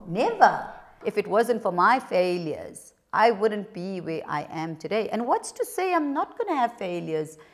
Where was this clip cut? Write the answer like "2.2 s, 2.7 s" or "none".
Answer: 1.0 s